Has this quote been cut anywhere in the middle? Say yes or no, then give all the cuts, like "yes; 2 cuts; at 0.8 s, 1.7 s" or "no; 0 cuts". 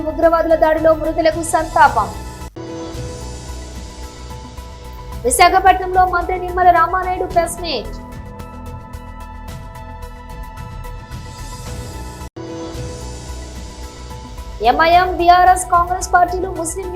yes; 2 cuts; at 8.4 s, 12.3 s